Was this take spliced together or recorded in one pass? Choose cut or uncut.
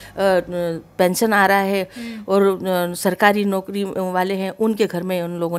uncut